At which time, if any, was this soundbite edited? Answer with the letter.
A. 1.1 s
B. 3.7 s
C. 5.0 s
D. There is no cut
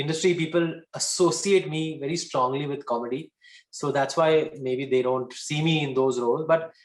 D